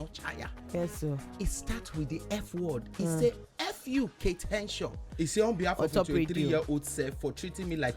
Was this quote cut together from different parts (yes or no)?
yes